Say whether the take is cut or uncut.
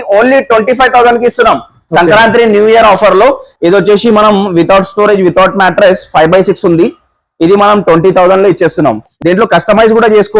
cut